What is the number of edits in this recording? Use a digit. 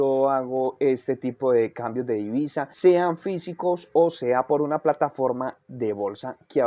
0